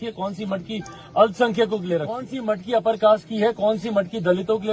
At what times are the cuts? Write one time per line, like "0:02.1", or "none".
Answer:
0:02.3